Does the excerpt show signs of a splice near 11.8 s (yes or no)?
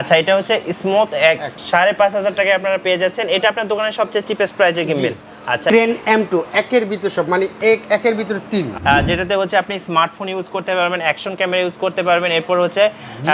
no